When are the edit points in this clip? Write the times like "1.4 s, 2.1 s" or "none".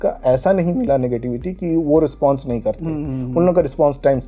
none